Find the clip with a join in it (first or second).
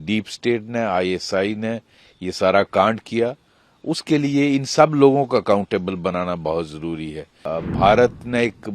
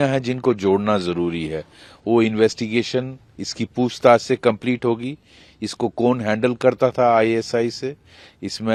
first